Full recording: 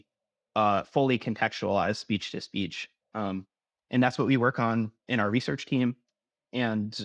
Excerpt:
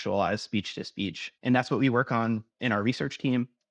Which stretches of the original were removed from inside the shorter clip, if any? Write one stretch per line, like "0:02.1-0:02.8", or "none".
0:02.8-0:03.7